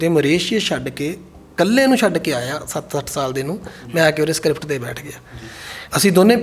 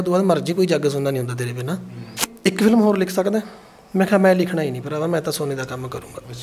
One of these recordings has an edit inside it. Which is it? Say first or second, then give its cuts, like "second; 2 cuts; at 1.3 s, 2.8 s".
second; 1 cut; at 2.3 s